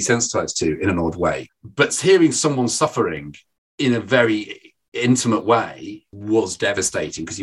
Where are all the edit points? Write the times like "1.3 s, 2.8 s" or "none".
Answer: 1.5 s, 6.1 s